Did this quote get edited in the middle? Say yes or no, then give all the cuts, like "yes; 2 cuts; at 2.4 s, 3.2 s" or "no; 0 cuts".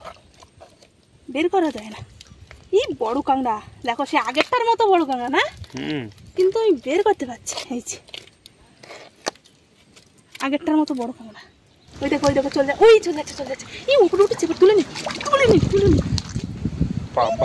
yes; 2 cuts; at 11.9 s, 16.2 s